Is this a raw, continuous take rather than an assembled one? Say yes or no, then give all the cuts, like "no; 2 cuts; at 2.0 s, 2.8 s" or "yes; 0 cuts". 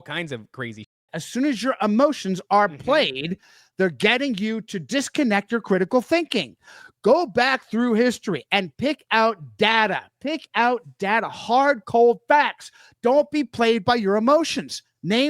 no; 1 cut; at 1.0 s